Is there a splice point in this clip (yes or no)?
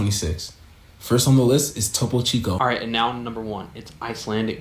yes